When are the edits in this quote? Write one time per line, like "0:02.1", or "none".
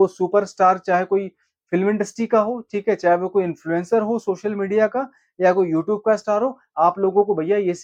none